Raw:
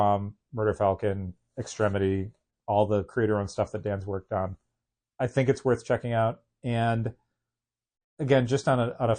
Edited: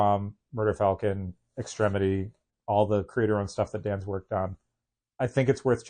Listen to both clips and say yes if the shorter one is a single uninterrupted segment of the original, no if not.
yes